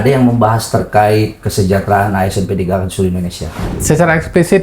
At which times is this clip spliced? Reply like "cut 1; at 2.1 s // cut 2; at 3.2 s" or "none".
cut 1; at 3.6 s